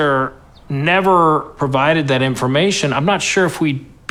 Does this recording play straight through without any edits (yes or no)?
yes